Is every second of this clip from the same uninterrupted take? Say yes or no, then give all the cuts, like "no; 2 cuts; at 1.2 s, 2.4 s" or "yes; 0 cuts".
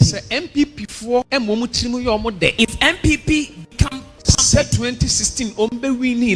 no; 3 cuts; at 1.3 s, 2.5 s, 4.1 s